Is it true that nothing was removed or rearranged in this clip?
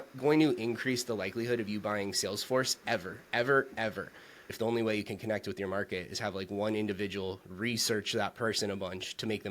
no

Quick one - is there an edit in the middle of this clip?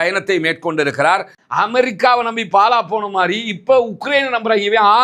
yes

